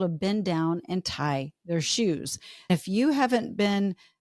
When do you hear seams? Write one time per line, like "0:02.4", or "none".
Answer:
0:02.7